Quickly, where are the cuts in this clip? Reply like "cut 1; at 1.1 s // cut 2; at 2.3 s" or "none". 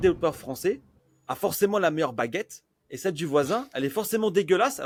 none